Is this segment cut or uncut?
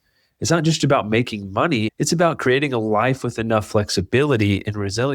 cut